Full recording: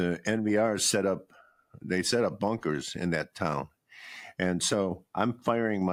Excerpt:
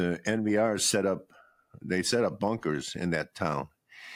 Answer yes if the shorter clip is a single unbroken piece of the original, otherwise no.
yes